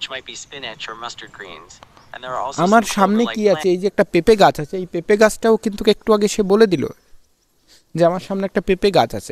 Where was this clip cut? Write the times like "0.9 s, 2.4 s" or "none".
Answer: 2.4 s